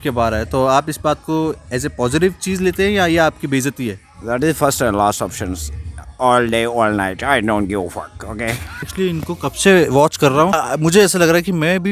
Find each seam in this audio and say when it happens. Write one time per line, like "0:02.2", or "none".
0:08.9
0:10.5